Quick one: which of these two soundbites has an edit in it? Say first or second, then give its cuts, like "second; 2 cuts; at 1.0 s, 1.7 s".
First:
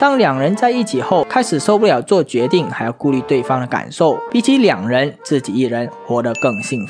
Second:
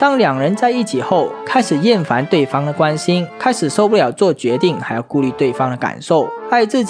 first; 2 cuts; at 1.3 s, 4.2 s